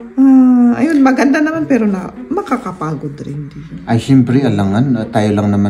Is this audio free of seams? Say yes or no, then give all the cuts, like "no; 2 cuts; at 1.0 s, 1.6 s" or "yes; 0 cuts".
yes; 0 cuts